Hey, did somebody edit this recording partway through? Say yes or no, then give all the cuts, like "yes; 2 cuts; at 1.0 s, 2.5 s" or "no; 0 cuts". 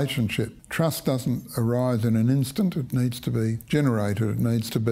yes; 1 cut; at 3.6 s